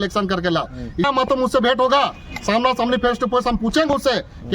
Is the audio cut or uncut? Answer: cut